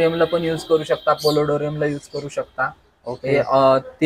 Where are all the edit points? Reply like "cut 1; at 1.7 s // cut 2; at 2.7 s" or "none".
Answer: none